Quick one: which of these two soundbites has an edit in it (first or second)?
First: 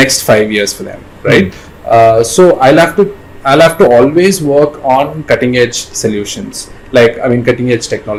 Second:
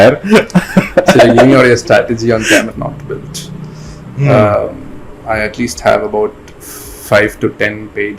second